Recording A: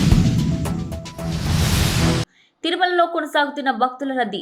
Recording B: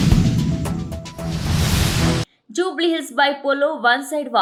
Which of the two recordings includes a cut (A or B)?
A